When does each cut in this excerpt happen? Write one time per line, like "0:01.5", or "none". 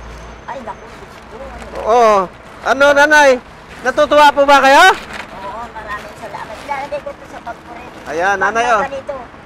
none